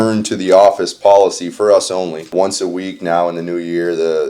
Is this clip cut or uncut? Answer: cut